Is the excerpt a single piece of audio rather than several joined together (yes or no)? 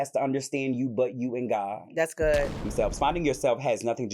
no